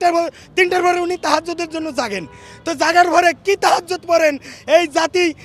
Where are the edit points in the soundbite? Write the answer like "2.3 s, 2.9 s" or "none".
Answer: none